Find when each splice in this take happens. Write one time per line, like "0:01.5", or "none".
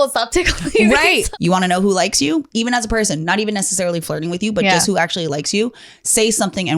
0:01.3